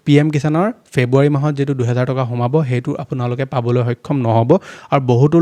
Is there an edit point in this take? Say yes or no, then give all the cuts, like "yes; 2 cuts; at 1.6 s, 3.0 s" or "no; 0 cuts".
no; 0 cuts